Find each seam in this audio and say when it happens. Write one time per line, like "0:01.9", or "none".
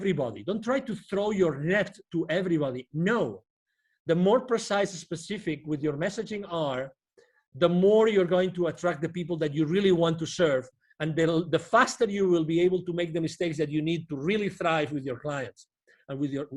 none